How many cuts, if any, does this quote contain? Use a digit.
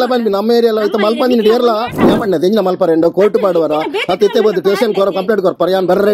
1